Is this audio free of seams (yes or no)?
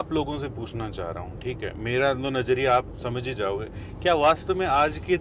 yes